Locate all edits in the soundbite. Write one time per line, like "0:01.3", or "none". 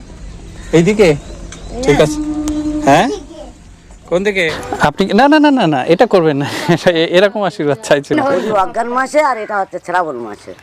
0:04.6
0:08.2